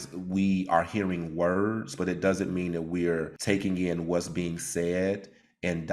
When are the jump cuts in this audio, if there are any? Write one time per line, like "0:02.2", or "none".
0:03.3